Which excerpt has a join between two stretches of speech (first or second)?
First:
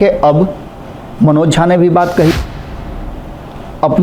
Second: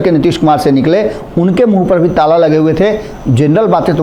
first